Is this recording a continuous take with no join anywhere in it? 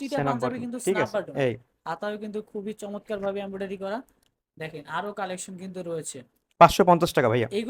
yes; 0 cuts

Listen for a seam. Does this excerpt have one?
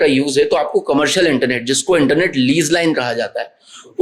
no; 0 cuts

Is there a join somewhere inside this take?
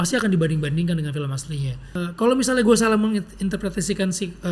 yes; 1 cut; at 2.0 s

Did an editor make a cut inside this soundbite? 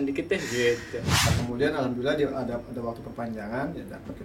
yes; 1 cut; at 1.3 s

